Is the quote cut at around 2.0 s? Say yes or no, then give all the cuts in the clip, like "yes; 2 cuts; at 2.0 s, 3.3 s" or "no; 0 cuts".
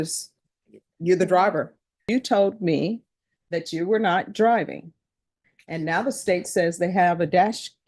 yes; 1 cut; at 2.0 s